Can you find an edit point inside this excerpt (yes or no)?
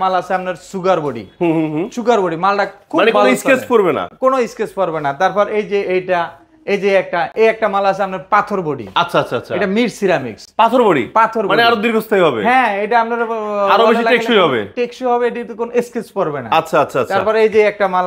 no